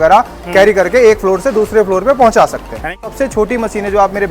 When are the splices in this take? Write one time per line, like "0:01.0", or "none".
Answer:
0:03.0

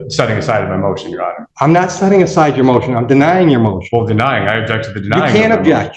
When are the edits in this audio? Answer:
0:01.4

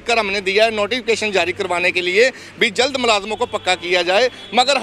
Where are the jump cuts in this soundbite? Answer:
none

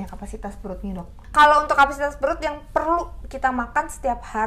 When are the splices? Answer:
0:01.2

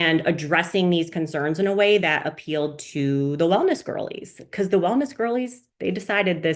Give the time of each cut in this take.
0:05.6

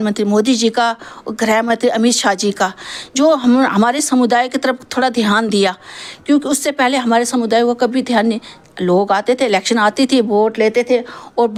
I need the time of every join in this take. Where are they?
none

